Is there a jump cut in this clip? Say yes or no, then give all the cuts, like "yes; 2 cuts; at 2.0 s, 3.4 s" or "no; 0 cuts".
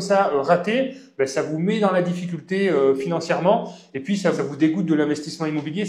yes; 1 cut; at 4.4 s